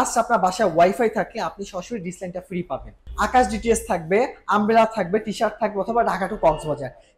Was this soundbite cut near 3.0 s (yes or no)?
yes